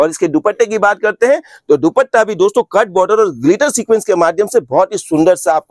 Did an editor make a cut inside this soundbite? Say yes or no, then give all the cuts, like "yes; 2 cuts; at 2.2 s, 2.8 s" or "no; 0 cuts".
no; 0 cuts